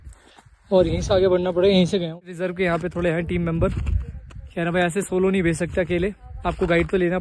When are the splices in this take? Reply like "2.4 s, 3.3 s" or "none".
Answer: 2.2 s